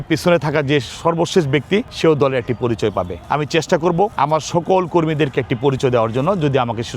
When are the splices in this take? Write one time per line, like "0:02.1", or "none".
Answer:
0:01.9
0:03.2
0:04.1